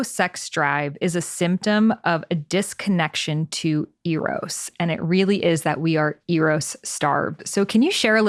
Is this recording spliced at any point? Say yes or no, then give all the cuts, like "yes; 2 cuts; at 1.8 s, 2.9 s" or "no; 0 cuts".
no; 0 cuts